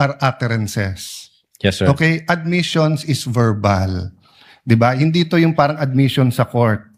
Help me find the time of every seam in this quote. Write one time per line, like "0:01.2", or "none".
none

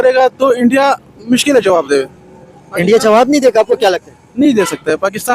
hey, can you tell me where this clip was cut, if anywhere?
none

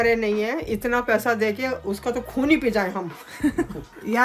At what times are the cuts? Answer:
none

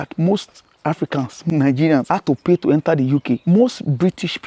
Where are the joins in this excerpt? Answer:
0:01.4
0:02.1
0:03.4

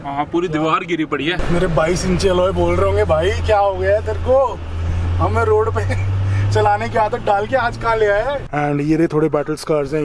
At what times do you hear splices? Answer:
0:01.4
0:08.4

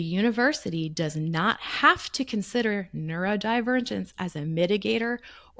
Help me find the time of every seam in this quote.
none

